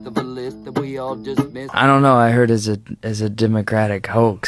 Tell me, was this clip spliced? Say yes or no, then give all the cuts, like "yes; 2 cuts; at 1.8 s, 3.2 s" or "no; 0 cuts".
yes; 1 cut; at 1.7 s